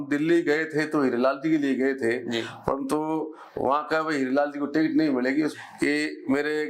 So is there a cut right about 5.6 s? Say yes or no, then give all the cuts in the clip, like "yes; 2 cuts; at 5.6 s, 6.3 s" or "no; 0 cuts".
yes; 1 cut; at 5.6 s